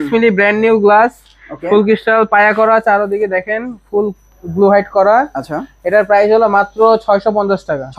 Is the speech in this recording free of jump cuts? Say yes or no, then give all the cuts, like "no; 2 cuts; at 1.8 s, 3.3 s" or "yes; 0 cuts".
yes; 0 cuts